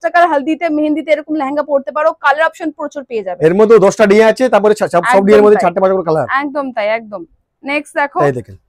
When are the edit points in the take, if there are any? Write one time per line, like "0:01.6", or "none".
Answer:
none

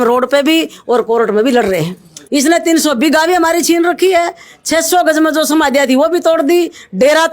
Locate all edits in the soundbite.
0:02.1

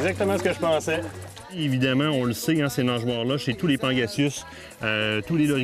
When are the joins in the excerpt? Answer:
0:01.6

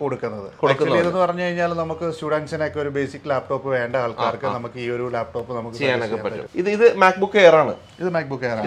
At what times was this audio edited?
0:06.4

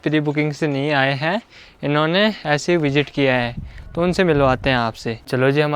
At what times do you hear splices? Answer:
none

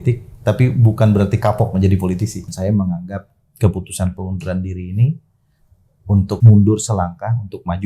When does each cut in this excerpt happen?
0:02.4
0:06.4

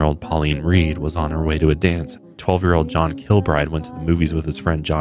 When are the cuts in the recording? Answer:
0:02.4

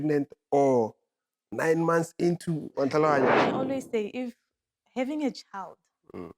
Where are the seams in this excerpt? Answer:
0:03.3

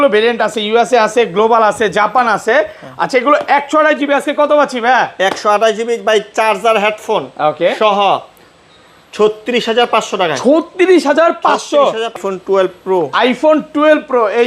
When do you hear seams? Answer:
0:12.2

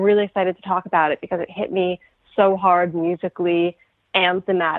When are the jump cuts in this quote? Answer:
none

